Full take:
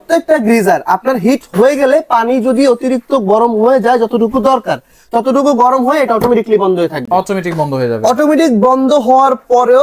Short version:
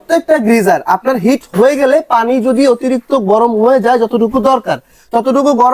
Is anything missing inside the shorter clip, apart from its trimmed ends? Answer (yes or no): no